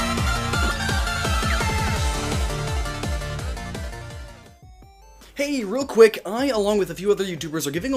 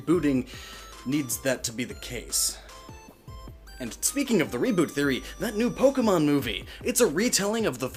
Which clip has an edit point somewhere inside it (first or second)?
first